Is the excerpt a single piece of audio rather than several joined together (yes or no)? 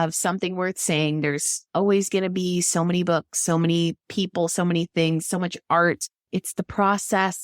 no